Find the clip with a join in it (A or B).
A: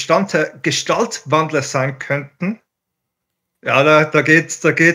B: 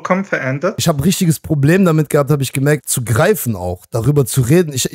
B